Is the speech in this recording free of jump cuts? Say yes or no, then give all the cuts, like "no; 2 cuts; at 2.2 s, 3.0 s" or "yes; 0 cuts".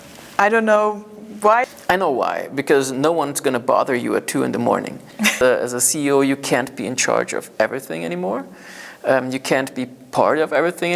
no; 2 cuts; at 1.7 s, 5.4 s